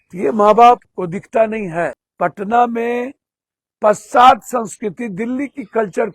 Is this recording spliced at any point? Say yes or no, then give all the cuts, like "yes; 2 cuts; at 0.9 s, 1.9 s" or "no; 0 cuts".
yes; 2 cuts; at 0.9 s, 2.0 s